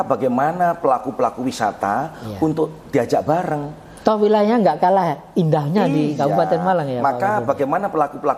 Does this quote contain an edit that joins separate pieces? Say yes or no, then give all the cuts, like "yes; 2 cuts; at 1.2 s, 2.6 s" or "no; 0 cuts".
no; 0 cuts